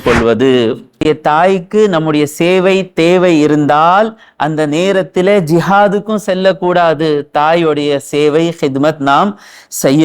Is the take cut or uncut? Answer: cut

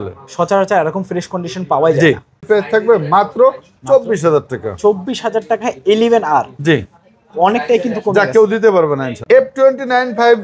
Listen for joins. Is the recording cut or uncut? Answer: cut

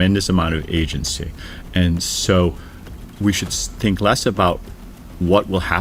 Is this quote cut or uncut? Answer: uncut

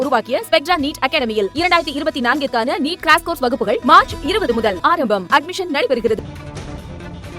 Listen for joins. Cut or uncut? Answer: cut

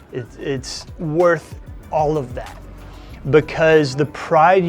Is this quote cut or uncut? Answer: uncut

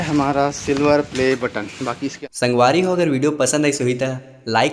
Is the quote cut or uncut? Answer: cut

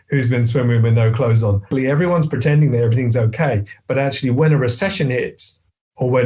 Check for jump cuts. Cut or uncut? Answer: cut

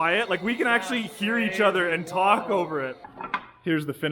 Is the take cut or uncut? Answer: cut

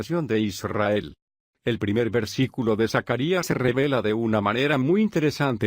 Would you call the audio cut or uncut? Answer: cut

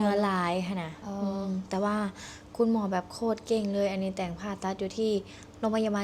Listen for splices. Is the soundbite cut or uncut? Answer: uncut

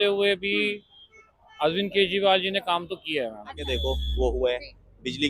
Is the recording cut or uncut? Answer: cut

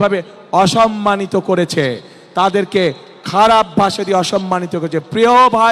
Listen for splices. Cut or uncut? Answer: uncut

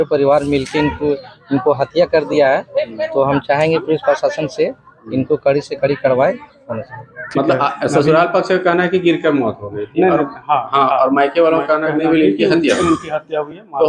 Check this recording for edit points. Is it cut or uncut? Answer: cut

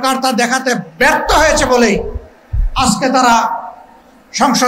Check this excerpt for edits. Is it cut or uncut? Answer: uncut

